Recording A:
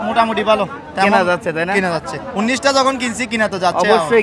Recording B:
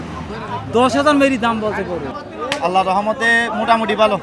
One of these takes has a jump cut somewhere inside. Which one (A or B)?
B